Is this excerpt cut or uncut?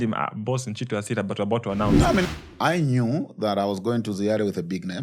cut